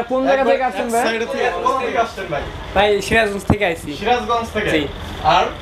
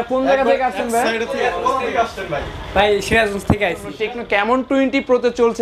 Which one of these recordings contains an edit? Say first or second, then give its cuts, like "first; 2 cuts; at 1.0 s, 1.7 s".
second; 1 cut; at 3.9 s